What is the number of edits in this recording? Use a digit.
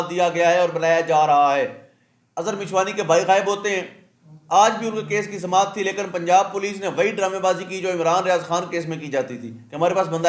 0